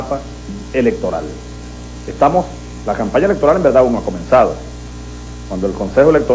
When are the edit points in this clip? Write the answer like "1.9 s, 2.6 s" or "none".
3.7 s